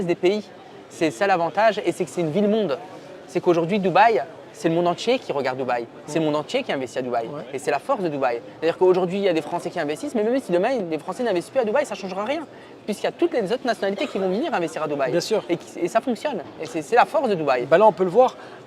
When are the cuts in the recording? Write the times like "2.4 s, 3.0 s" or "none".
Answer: none